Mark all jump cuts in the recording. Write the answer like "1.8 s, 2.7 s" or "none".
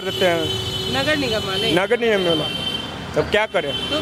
none